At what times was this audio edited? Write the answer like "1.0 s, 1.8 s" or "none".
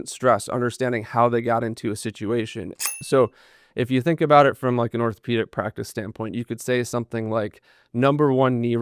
2.9 s